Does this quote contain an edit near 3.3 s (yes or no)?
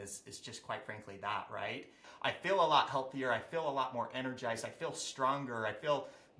no